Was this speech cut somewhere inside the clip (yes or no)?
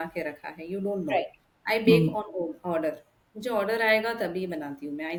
no